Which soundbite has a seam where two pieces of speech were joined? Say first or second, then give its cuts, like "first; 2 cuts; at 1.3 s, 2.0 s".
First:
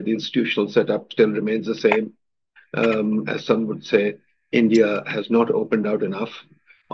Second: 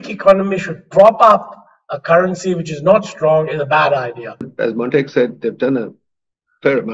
second; 1 cut; at 4.5 s